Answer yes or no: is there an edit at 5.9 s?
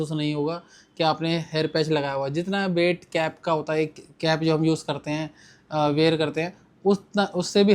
no